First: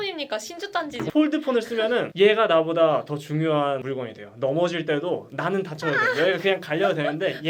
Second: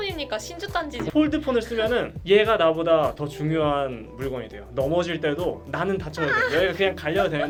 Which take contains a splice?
first; 2 cuts; at 2.1 s, 3.8 s

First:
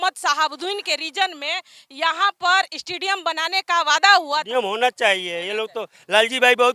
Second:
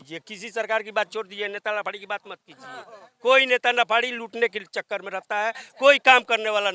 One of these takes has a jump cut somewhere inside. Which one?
first; 1 cut; at 4.5 s

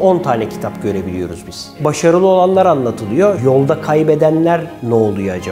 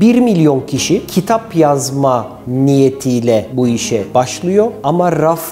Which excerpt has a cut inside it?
first; 2 cuts; at 1.8 s, 3.4 s

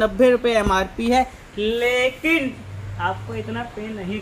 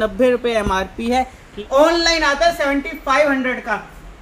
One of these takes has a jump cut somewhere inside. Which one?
second; 1 cut; at 1.5 s

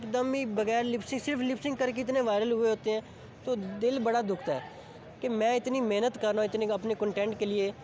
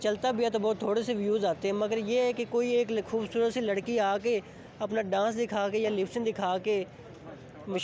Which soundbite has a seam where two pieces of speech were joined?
first; 1 cut; at 4.6 s

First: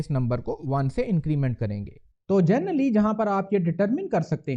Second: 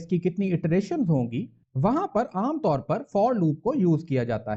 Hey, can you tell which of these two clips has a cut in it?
first; 1 cut; at 2.0 s

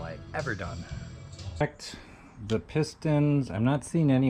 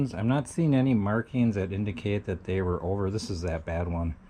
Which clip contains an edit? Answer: first; 1 cut; at 1.6 s

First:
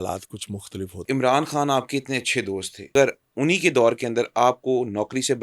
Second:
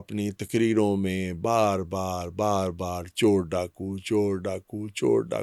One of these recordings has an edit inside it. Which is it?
first; 2 cuts; at 1.0 s, 2.9 s

